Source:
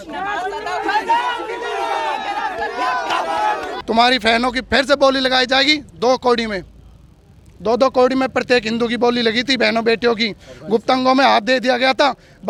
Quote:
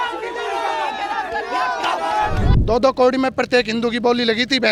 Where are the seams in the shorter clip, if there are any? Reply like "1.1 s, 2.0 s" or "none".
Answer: 2.5 s